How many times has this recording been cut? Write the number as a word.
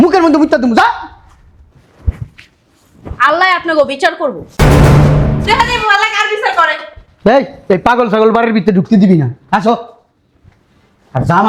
zero